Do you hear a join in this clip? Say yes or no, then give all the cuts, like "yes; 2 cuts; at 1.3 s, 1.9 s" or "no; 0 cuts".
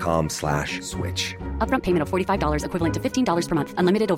no; 0 cuts